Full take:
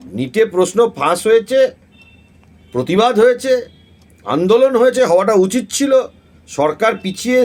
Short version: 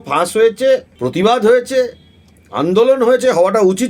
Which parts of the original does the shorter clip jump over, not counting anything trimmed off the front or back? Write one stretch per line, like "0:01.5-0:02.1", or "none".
0:01.9-0:02.7